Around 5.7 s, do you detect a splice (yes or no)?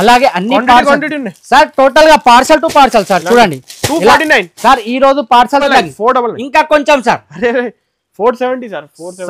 yes